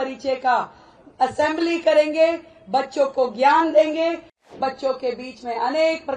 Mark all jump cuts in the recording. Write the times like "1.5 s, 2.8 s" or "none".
4.5 s

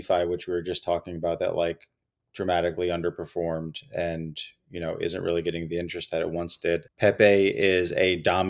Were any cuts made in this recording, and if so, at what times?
6.9 s

